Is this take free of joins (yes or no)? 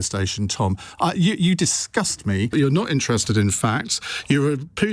no